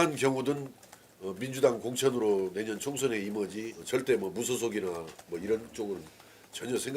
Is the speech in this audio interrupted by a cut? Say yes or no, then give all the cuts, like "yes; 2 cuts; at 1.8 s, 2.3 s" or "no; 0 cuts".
yes; 1 cut; at 3.8 s